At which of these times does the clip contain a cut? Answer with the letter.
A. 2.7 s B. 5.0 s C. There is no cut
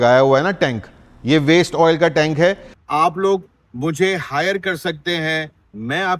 A